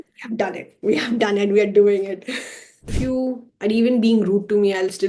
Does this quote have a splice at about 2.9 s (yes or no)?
yes